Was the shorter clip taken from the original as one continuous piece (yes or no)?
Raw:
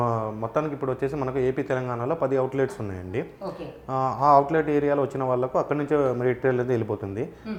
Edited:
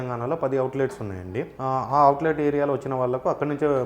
no